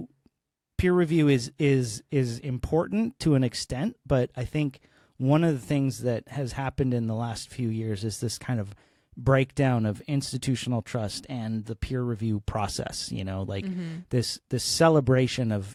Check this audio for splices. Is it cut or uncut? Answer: uncut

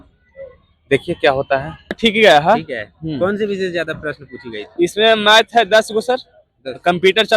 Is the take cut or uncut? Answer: cut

